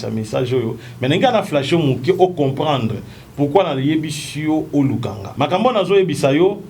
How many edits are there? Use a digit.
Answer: 1